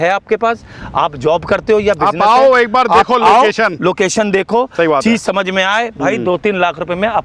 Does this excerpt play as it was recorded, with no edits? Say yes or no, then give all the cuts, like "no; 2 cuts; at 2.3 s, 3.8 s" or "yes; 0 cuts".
yes; 0 cuts